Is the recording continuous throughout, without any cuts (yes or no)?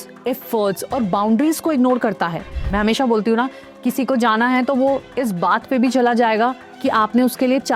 no